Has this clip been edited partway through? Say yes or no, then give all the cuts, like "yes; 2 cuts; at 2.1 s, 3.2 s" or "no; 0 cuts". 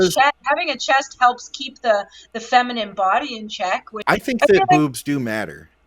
yes; 1 cut; at 3.9 s